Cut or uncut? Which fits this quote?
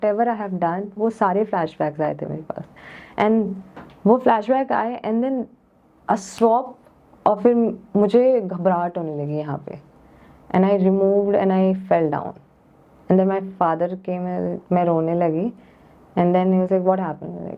uncut